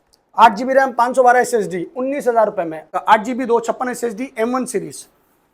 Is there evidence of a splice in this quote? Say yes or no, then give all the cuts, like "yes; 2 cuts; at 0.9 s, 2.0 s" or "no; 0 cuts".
yes; 1 cut; at 2.9 s